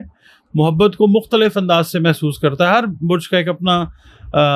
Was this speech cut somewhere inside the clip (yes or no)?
no